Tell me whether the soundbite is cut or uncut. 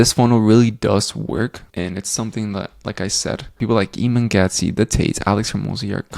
uncut